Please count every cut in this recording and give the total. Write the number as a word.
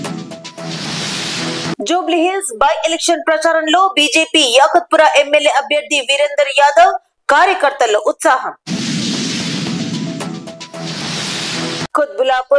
one